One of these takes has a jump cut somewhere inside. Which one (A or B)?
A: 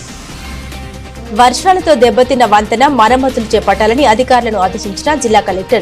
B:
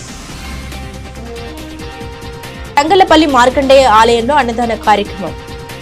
A